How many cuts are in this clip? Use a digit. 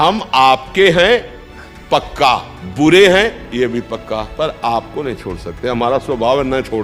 2